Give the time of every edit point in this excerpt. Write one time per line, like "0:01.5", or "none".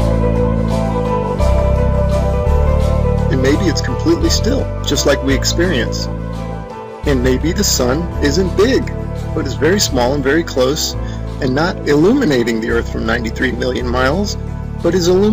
0:08.0